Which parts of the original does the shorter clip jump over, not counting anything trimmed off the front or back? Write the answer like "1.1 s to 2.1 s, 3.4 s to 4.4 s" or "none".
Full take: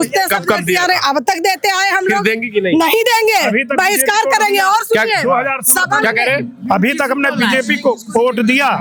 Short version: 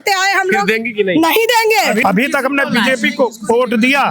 3.6 s to 6.7 s